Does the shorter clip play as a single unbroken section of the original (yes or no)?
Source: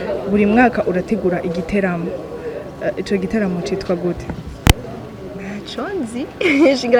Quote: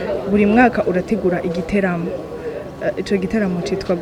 yes